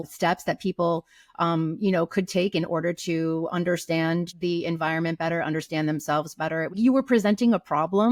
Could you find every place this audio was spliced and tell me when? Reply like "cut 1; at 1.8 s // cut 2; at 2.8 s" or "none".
none